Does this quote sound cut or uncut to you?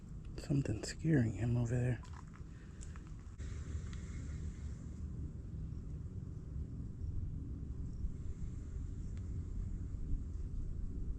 cut